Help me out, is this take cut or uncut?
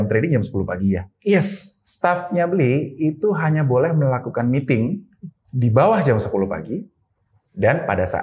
uncut